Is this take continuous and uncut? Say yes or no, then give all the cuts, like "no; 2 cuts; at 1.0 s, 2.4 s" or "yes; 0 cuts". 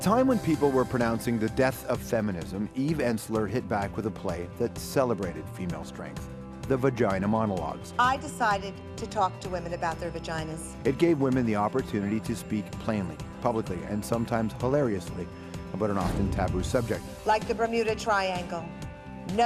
yes; 0 cuts